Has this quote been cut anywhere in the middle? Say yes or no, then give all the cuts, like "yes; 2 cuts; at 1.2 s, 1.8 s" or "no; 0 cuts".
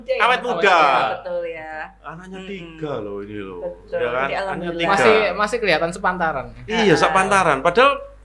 no; 0 cuts